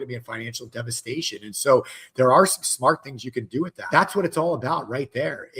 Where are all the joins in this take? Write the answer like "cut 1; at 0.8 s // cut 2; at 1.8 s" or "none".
cut 1; at 3.8 s